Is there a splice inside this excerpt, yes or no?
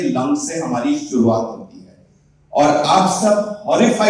no